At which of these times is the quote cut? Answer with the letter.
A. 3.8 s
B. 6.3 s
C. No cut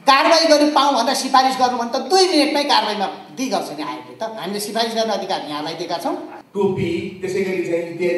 B